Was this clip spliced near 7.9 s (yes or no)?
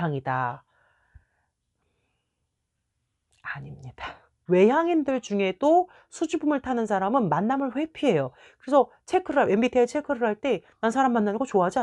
no